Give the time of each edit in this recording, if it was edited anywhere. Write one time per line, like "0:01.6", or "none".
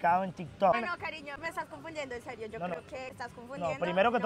0:00.8
0:03.1